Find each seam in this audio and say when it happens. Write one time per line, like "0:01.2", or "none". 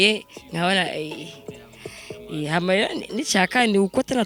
none